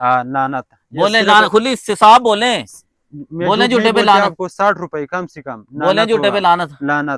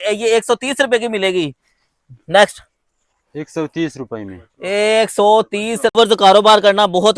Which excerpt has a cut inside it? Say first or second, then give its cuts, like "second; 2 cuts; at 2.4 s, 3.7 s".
second; 1 cut; at 5.9 s